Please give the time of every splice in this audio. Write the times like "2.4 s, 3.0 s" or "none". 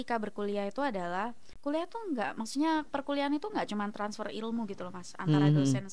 1.5 s